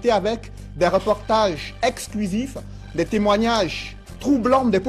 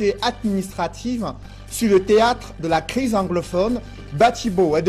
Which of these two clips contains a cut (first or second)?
first